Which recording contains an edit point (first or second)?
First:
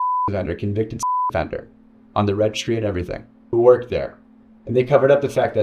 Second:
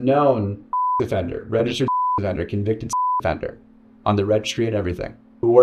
second